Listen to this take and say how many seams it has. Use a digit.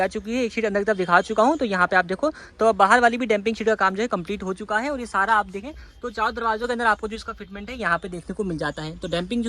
0